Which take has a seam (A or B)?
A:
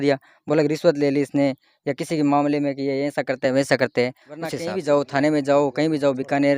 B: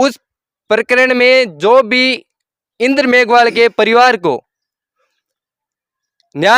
A